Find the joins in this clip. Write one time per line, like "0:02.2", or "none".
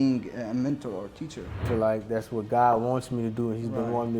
0:01.6